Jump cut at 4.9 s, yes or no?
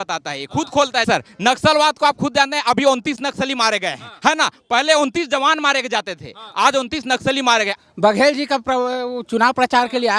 no